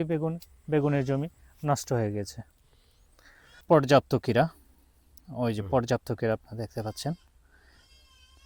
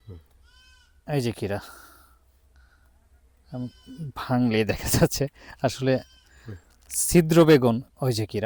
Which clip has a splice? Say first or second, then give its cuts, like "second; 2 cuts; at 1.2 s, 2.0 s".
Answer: first; 1 cut; at 3.6 s